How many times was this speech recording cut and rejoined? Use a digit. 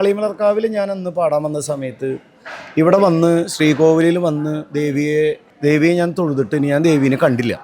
1